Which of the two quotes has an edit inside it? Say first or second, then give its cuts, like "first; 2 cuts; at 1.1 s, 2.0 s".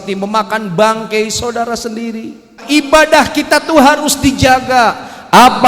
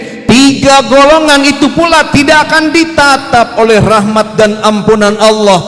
first; 1 cut; at 2.6 s